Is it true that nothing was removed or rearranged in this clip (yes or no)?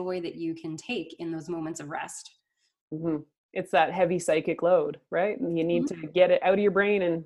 yes